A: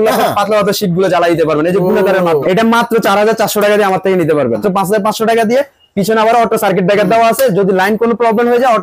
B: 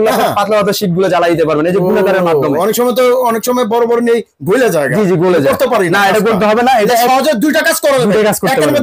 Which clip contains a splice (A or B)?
A